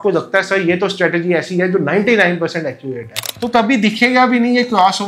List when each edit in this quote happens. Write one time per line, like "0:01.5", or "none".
0:03.3